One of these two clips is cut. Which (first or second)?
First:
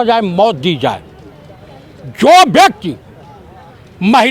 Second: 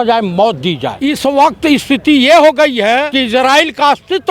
second